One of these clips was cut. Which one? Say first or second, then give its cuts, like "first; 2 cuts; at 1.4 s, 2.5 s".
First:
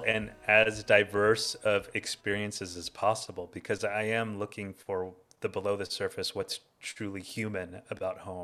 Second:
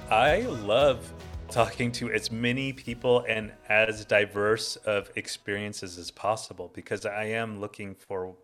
second; 1 cut; at 1.2 s